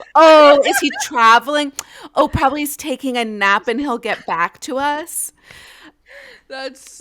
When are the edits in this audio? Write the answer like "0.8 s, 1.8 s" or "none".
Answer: 6.0 s